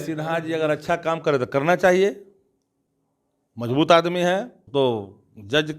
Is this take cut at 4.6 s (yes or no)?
yes